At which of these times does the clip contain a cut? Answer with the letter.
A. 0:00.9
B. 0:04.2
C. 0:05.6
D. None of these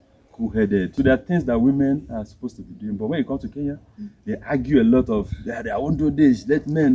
A